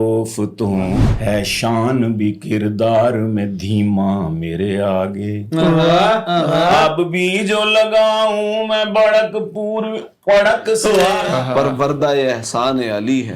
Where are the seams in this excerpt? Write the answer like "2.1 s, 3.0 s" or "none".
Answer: 1.1 s, 11.3 s

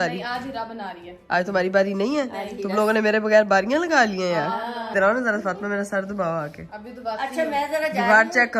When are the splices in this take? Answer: none

